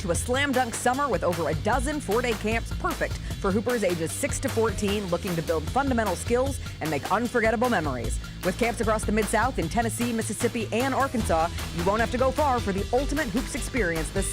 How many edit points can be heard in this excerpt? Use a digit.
0